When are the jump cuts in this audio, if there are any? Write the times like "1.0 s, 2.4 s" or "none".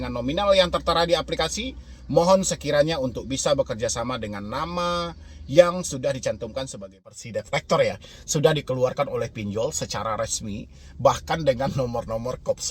7.2 s